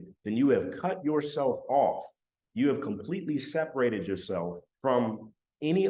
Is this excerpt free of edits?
no; 1 cut; at 4.7 s

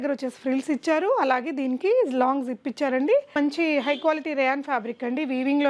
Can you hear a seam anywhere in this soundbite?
yes; 1 cut; at 3.4 s

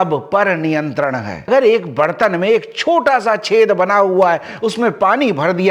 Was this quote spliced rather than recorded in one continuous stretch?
yes; 1 cut; at 1.5 s

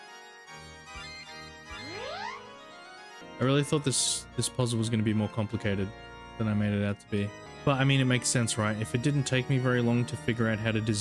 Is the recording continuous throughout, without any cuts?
no; 2 cuts; at 3.2 s, 7.5 s

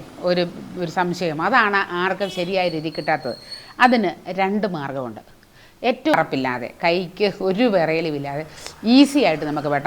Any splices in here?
yes; 1 cut; at 6.1 s

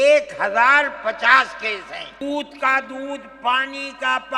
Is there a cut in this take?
yes; 1 cut; at 2.2 s

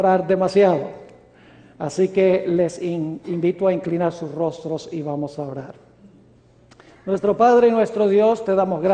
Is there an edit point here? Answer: no; 0 cuts

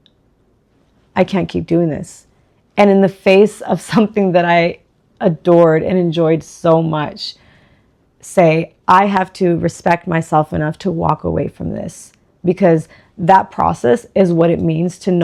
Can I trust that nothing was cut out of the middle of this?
yes; 0 cuts

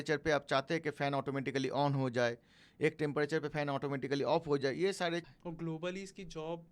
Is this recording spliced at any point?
yes; 1 cut; at 5.3 s

